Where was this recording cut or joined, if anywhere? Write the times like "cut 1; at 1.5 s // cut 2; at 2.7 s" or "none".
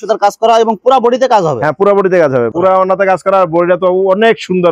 cut 1; at 2.5 s